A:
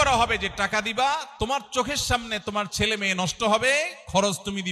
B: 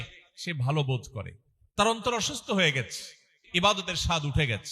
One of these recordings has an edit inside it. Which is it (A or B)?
B